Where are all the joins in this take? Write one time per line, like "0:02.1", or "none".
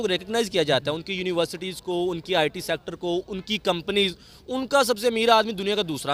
none